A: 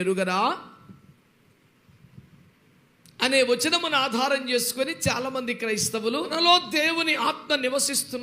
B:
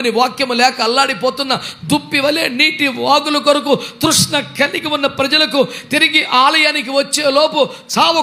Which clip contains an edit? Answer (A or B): A